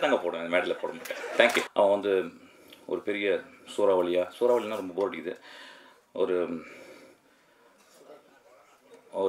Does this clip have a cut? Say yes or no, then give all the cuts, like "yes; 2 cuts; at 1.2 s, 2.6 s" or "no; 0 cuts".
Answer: yes; 1 cut; at 1.7 s